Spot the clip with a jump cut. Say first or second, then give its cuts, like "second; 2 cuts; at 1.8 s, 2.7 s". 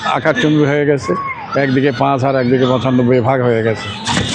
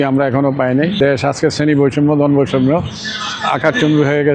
second; 1 cut; at 1.0 s